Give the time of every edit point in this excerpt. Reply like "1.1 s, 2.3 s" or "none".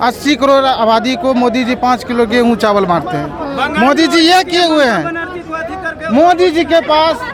none